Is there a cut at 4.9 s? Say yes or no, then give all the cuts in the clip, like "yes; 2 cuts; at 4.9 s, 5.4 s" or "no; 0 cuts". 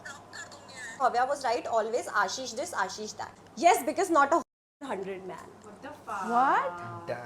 no; 2 cuts; at 1.0 s, 3.4 s